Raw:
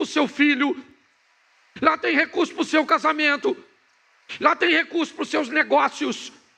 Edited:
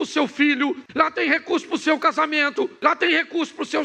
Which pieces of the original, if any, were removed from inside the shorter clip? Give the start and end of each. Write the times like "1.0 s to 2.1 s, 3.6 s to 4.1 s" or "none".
0.8 s to 1.7 s, 3.6 s to 4.3 s